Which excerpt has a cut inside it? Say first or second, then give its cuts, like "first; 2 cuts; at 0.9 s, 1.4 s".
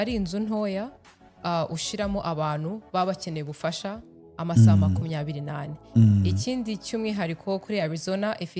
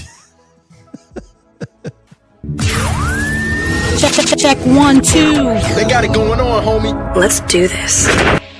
second; 1 cut; at 2.6 s